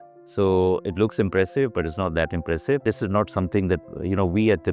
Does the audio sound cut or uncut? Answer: cut